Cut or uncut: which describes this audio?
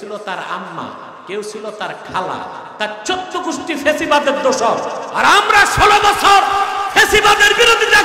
cut